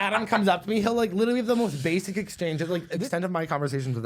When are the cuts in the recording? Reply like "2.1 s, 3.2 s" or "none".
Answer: 2.9 s